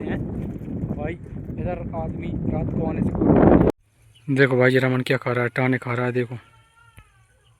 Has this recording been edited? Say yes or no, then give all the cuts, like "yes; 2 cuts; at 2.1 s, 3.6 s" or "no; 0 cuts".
yes; 1 cut; at 3.7 s